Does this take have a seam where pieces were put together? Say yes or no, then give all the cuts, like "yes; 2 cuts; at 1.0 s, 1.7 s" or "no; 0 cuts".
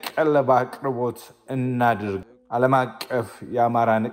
yes; 1 cut; at 2.2 s